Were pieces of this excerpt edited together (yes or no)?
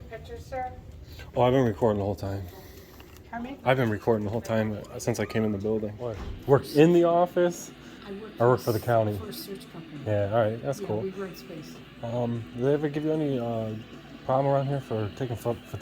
yes